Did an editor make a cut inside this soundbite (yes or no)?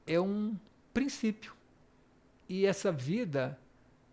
no